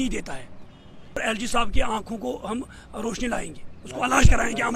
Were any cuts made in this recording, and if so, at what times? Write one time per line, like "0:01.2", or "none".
0:01.1